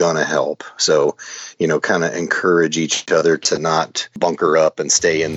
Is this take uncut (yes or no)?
no